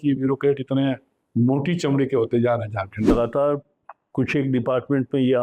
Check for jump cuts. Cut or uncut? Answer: cut